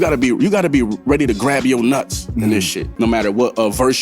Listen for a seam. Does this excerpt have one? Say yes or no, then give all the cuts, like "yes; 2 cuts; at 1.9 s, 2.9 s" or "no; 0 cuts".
yes; 1 cut; at 2.8 s